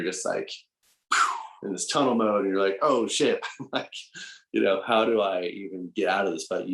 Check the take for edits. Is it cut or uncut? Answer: uncut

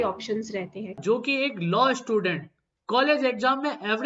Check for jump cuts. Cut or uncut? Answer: cut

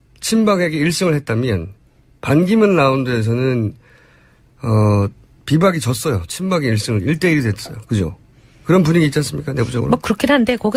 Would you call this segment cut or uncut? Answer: uncut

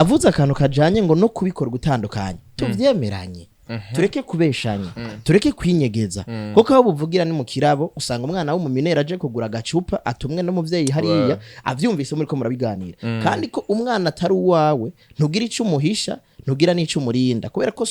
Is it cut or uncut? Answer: uncut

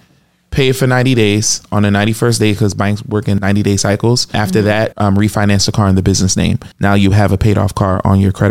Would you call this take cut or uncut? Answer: cut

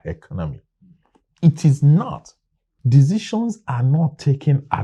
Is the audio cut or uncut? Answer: uncut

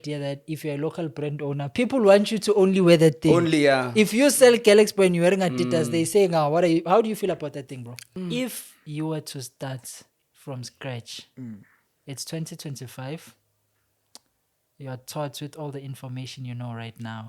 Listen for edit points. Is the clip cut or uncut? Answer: cut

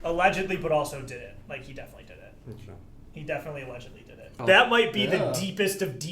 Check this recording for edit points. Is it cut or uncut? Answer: cut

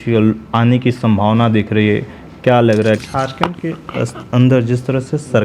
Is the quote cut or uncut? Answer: cut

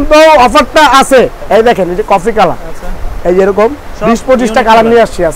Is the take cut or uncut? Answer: cut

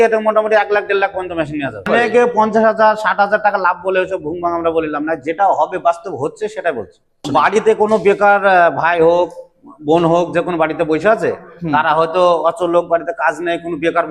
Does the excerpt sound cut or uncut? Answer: cut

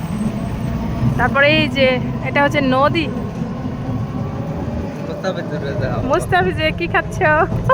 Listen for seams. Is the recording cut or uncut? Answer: uncut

